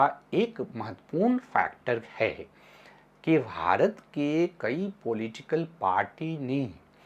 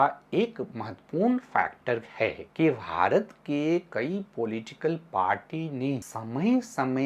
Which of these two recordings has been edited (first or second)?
second